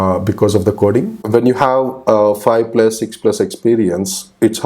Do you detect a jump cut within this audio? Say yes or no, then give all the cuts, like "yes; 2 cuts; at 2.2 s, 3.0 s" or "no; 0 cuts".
yes; 1 cut; at 1.2 s